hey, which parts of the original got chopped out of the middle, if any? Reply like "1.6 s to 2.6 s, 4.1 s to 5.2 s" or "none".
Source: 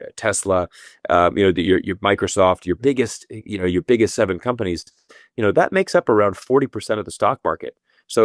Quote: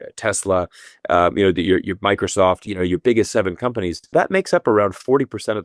2.6 s to 3.4 s, 4.9 s to 5.5 s